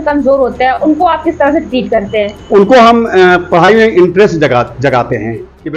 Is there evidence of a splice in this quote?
no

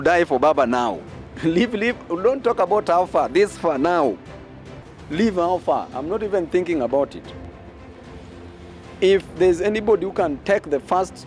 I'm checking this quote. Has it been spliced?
no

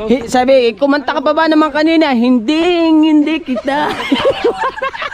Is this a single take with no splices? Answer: yes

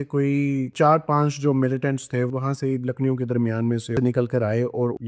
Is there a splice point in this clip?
yes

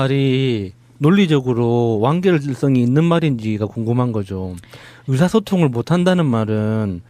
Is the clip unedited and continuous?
no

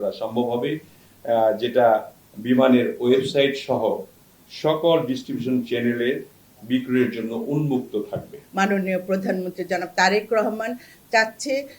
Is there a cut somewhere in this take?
yes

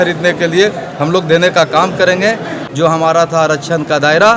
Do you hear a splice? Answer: yes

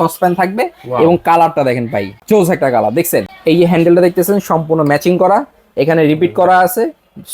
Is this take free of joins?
no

